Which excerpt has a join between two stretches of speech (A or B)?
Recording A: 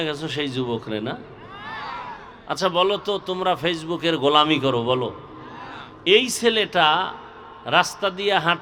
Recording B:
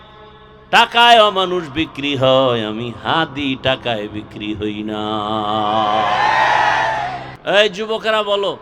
B